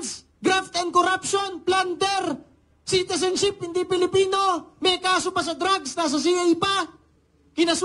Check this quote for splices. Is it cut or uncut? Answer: uncut